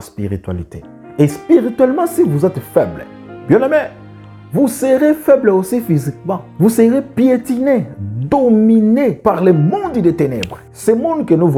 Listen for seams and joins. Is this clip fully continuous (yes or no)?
yes